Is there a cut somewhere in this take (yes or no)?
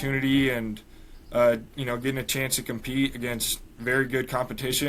no